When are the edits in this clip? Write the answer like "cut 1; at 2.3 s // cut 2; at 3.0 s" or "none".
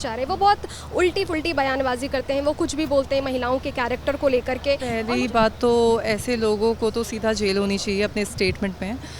cut 1; at 4.8 s